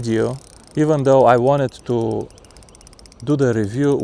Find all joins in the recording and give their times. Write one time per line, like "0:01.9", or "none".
none